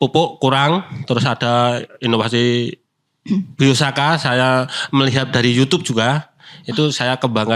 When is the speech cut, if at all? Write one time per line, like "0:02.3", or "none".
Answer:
none